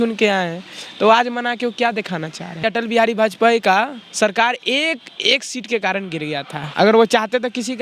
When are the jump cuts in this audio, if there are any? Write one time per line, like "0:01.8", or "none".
0:02.6
0:06.6